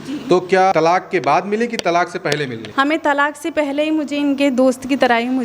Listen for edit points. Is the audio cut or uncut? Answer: cut